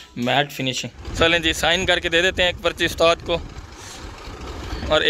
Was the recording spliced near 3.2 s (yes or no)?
no